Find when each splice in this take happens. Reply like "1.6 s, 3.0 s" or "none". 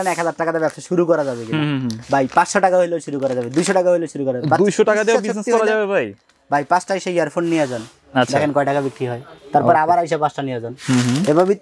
none